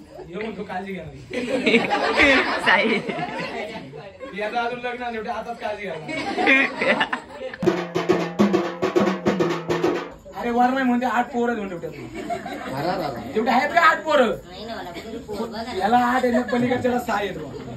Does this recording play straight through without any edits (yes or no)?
no